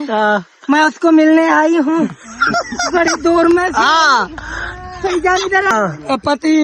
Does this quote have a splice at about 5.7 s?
yes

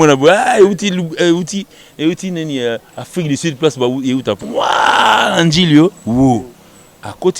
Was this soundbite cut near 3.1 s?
no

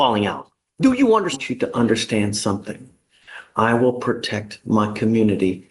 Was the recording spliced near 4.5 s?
no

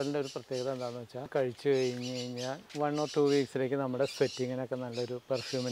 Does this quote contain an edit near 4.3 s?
no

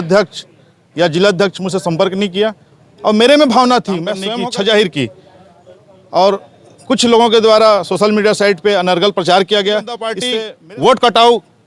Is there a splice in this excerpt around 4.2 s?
yes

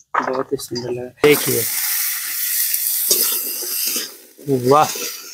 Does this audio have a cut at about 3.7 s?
no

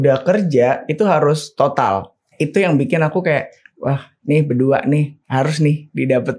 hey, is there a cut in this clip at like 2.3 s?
yes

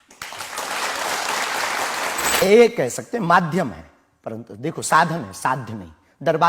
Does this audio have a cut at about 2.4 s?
yes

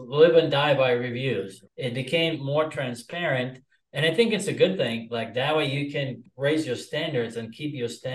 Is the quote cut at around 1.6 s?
yes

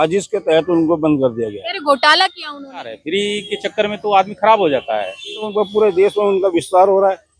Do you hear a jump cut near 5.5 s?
yes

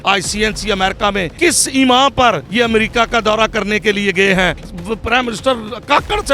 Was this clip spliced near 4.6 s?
yes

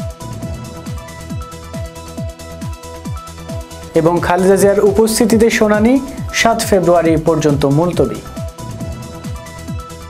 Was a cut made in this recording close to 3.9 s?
yes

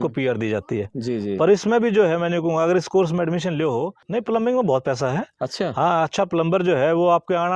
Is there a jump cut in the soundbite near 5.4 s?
no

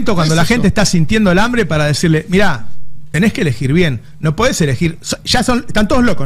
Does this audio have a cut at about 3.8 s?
no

